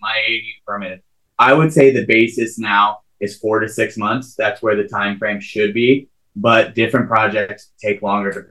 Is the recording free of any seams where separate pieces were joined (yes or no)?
yes